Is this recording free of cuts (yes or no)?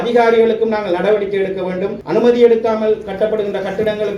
no